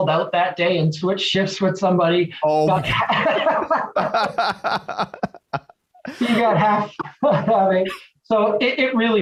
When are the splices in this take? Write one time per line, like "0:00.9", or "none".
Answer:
none